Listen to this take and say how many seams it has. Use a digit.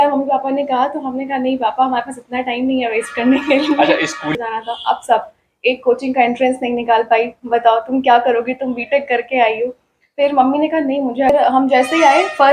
2